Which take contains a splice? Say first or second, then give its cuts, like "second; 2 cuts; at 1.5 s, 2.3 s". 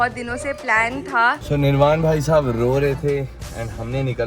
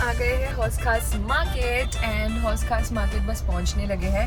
first; 1 cut; at 1.4 s